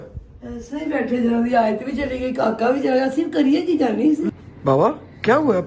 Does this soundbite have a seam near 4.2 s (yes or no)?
yes